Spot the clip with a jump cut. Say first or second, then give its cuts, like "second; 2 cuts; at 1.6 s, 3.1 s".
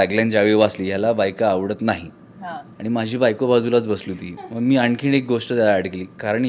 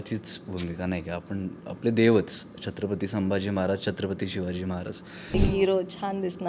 second; 1 cut; at 5.3 s